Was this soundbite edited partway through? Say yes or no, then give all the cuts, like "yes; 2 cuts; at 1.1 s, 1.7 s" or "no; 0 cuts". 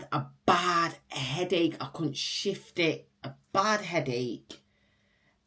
no; 0 cuts